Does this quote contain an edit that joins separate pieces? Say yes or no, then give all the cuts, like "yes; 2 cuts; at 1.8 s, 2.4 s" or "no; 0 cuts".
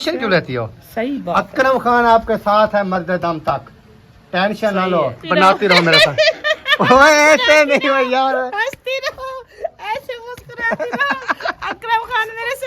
yes; 1 cut; at 5.2 s